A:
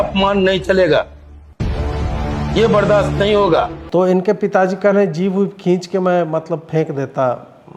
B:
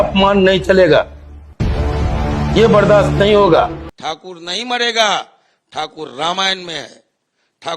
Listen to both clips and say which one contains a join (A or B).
B